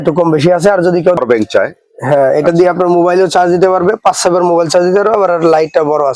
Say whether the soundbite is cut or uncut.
cut